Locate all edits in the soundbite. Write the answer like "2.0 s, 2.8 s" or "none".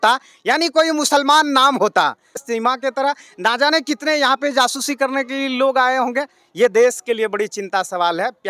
2.4 s